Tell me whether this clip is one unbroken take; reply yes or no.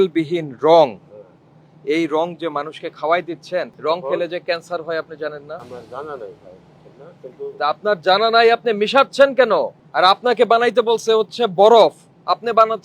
no